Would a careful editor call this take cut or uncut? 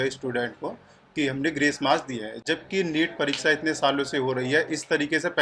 uncut